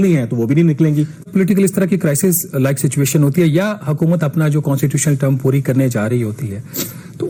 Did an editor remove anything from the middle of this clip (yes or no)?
no